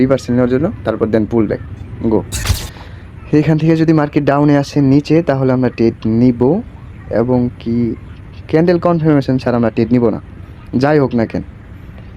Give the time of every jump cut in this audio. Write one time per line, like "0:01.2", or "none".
0:02.4